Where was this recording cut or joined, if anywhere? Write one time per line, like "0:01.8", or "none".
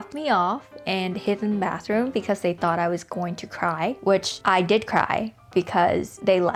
none